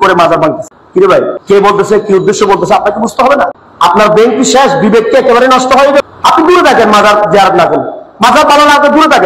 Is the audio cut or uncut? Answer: cut